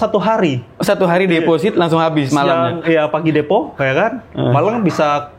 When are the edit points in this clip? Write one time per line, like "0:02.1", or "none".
none